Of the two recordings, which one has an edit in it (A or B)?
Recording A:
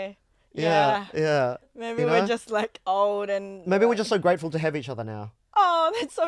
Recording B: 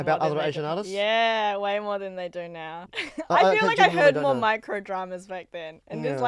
B